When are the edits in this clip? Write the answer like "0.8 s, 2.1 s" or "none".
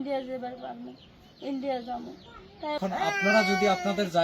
2.8 s